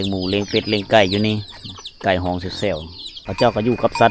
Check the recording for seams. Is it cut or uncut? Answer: cut